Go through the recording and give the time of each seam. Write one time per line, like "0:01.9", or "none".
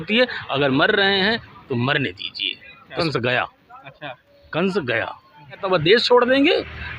0:02.9
0:05.6